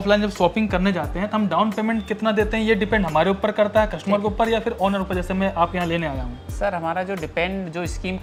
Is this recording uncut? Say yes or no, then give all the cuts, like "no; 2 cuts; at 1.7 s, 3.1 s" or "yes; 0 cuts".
yes; 0 cuts